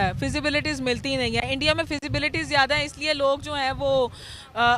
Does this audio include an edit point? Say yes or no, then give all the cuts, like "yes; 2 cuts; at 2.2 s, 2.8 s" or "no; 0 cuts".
no; 0 cuts